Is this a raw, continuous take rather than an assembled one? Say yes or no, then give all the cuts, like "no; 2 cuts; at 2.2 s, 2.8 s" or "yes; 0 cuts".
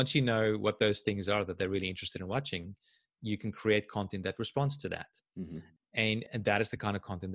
yes; 0 cuts